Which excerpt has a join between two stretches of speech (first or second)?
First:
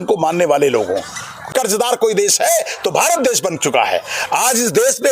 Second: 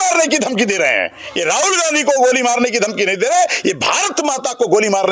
first